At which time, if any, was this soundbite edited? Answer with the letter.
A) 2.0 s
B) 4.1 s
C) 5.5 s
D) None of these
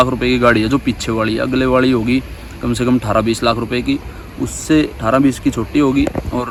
D